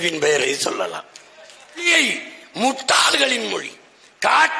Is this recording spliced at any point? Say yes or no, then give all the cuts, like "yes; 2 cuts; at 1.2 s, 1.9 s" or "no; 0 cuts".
yes; 1 cut; at 1.9 s